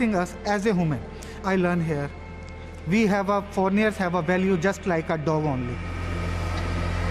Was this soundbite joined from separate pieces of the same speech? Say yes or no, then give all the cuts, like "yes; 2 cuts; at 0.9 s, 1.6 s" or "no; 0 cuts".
no; 0 cuts